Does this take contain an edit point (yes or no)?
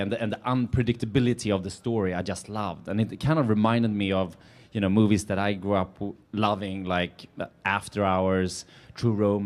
no